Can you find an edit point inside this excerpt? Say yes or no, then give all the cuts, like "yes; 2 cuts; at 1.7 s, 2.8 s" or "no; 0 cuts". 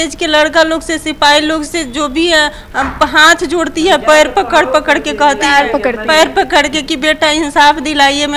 no; 0 cuts